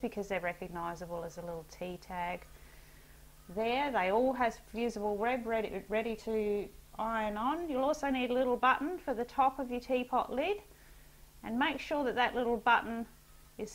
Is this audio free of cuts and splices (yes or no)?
no